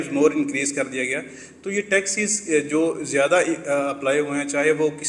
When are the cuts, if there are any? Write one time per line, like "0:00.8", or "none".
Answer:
none